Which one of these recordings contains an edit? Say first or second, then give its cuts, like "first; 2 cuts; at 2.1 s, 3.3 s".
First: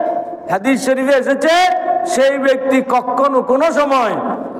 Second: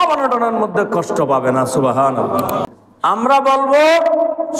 second; 1 cut; at 2.8 s